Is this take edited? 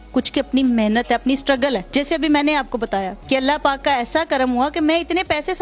no; 0 cuts

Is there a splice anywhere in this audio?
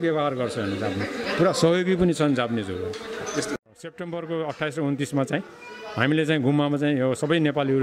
yes; 1 cut; at 3.7 s

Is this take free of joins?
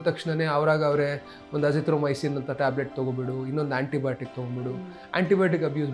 yes; 0 cuts

